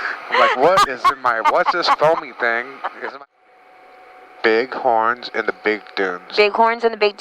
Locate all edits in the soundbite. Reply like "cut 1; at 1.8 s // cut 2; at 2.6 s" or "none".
cut 1; at 3.1 s